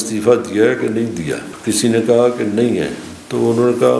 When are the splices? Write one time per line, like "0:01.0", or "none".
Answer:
0:01.5

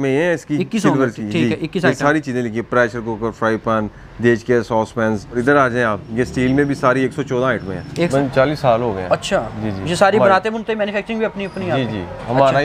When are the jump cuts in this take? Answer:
0:05.4
0:08.1

